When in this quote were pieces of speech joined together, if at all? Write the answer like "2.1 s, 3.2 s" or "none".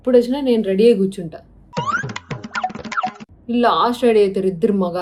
none